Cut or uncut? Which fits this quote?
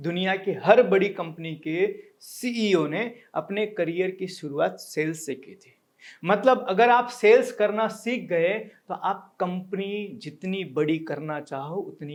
uncut